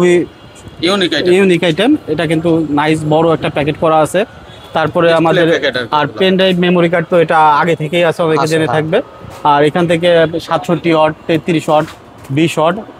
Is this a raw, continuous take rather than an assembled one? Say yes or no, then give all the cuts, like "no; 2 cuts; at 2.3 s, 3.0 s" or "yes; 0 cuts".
yes; 0 cuts